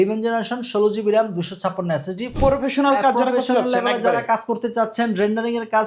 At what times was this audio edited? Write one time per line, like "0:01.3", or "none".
0:02.4